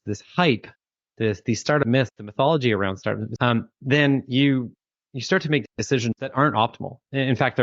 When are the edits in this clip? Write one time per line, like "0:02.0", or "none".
0:03.3